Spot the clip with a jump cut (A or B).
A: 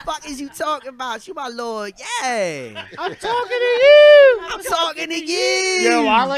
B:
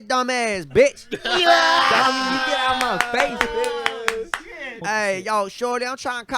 B